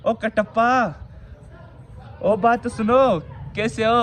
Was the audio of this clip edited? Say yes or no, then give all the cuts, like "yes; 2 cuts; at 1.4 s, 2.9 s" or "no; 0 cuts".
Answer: no; 0 cuts